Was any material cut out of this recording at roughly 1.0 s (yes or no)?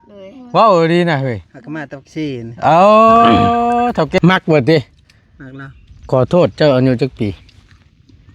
no